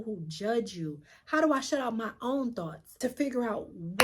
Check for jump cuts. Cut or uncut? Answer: cut